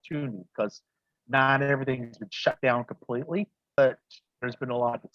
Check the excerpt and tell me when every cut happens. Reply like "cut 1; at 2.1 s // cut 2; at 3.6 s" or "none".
cut 1; at 3.8 s